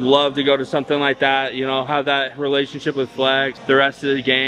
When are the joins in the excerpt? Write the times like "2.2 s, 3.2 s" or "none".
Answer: 3.6 s